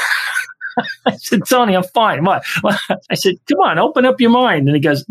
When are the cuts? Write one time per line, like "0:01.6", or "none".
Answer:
0:03.1